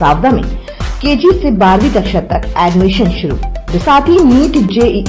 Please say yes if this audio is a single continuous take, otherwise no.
no